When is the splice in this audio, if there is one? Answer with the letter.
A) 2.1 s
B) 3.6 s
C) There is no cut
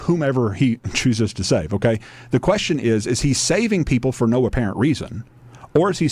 B